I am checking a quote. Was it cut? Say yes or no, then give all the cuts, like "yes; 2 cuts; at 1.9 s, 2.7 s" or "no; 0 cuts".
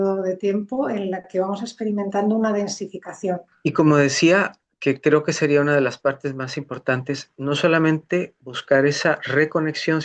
yes; 1 cut; at 3.5 s